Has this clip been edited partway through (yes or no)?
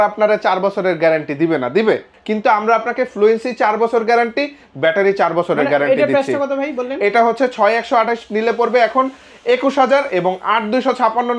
no